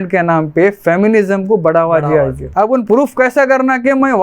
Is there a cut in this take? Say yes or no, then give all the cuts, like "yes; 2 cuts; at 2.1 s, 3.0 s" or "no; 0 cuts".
yes; 1 cut; at 2.4 s